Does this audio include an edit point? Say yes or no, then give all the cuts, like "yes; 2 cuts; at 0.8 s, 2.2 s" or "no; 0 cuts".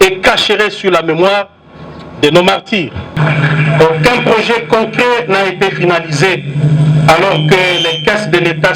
yes; 1 cut; at 3.1 s